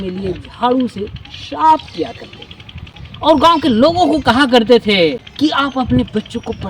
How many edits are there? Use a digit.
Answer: 1